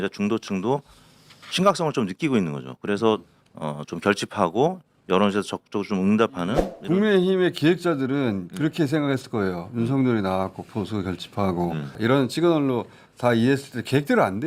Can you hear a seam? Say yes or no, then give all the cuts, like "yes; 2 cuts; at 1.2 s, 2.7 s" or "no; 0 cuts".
no; 0 cuts